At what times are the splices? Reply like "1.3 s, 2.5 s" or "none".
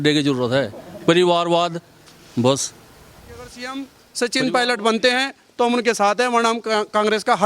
3.5 s